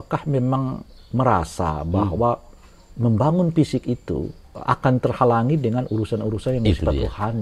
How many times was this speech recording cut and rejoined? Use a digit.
1